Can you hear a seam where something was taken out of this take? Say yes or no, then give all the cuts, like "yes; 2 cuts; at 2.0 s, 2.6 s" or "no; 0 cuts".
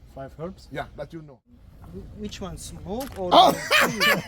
yes; 1 cut; at 1.7 s